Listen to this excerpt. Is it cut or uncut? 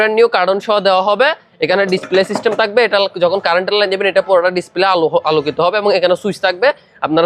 uncut